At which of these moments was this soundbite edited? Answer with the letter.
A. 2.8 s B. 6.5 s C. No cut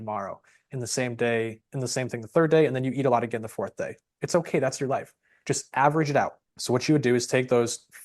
B